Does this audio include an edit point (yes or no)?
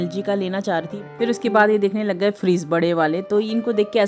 yes